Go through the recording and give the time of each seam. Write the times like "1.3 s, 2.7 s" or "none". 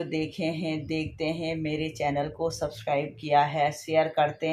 none